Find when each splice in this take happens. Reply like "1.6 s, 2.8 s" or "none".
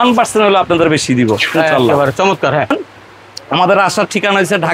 2.7 s